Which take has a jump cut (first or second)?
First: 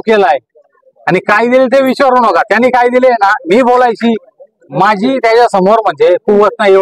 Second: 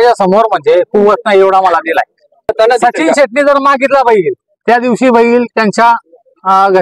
second